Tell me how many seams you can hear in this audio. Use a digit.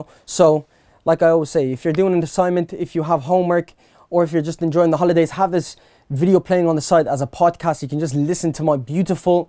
0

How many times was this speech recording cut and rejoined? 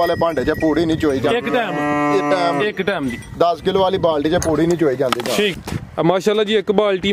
1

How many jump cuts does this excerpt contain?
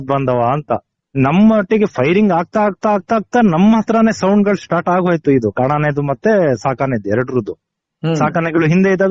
1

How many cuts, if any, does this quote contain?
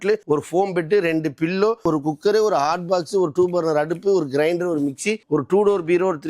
1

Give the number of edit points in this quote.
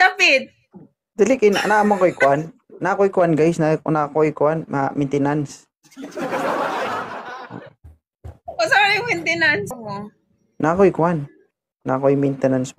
1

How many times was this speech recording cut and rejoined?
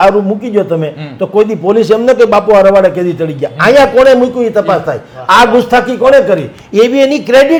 0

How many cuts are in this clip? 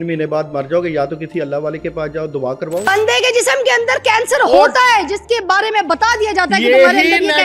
1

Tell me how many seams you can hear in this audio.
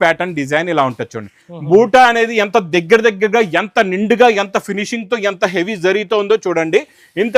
0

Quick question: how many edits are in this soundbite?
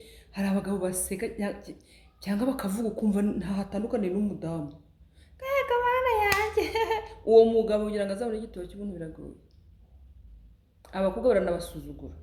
0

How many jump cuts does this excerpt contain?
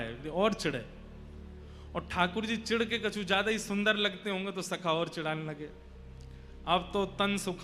0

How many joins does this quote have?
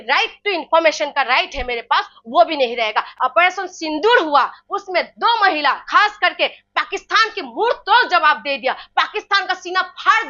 1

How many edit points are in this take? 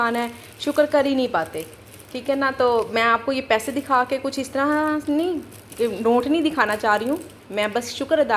0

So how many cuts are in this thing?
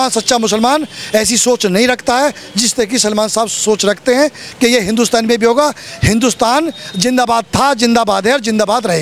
0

